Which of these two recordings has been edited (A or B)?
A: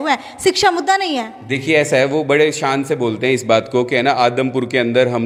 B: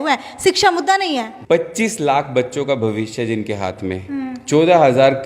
B